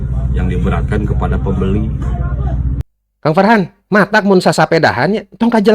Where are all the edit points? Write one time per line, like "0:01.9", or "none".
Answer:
0:02.8

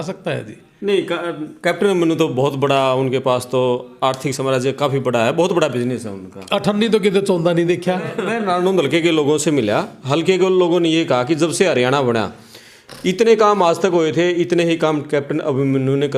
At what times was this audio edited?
0:08.2

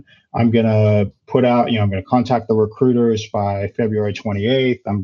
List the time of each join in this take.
none

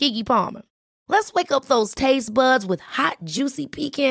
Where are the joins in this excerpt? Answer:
none

